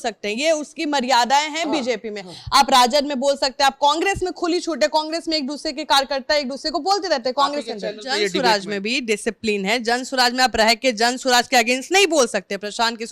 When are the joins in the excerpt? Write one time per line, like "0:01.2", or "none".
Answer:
0:08.3